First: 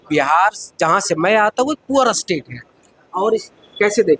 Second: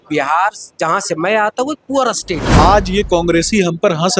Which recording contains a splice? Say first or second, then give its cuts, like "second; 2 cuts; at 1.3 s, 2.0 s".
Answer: second; 1 cut; at 2.6 s